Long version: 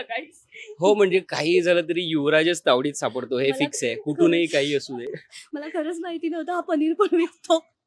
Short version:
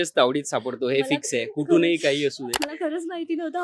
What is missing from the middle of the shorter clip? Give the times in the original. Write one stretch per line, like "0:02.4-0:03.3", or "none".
0:05.0-0:05.4